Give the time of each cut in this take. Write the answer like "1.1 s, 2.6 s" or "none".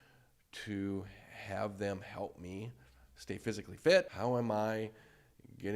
4.1 s

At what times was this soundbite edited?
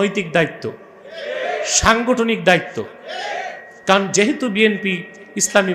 none

